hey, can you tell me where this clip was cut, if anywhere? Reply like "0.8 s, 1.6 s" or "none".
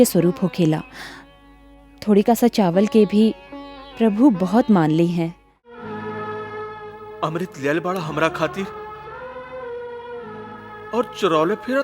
5.9 s